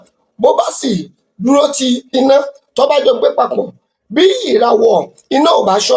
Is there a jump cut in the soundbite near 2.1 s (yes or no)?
yes